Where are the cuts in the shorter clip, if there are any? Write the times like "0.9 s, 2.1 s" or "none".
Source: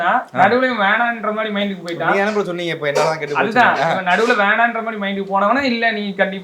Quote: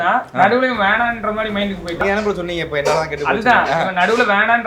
2.0 s